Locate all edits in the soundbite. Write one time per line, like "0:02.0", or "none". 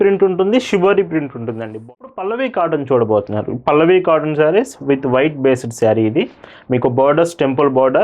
0:01.8